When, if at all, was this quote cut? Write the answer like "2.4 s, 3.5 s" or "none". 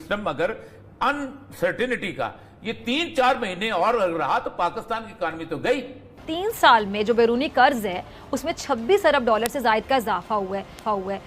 6.3 s